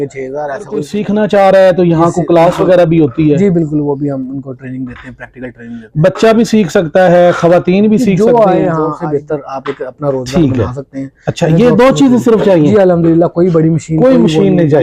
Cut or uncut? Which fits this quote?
cut